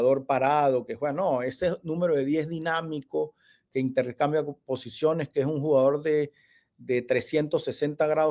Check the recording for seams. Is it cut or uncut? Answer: uncut